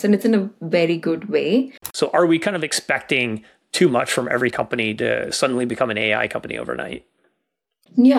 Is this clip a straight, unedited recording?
no; 1 cut; at 1.8 s

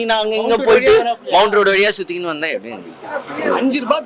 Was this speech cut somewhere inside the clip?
no; 0 cuts

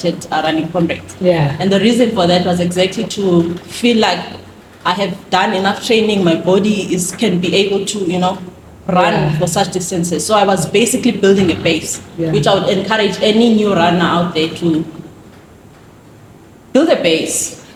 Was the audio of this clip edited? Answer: no; 0 cuts

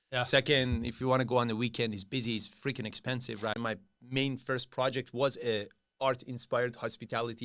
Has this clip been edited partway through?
yes; 1 cut; at 3.6 s

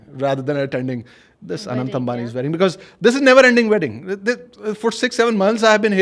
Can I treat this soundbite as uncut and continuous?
yes; 0 cuts

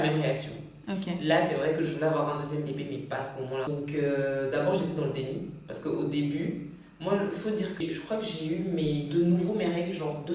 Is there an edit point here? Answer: yes; 2 cuts; at 3.7 s, 7.8 s

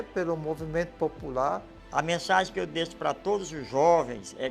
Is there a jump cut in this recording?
yes; 1 cut; at 1.8 s

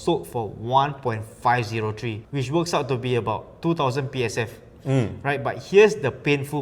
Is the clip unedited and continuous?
yes; 0 cuts

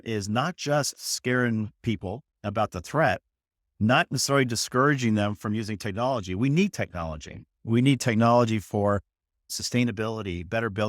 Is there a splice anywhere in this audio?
yes; 1 cut; at 9.1 s

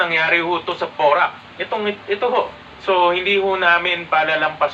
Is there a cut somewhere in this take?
yes; 1 cut; at 2.6 s

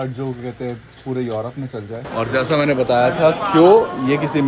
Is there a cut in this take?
yes; 1 cut; at 2.0 s

